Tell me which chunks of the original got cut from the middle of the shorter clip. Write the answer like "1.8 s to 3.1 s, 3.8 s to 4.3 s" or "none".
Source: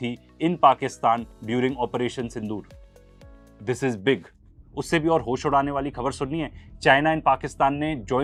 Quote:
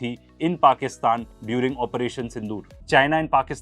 2.7 s to 6.6 s